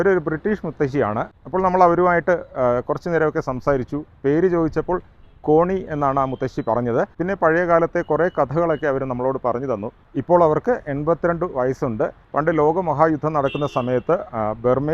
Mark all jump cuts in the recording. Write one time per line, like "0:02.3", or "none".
0:01.3
0:10.0
0:12.2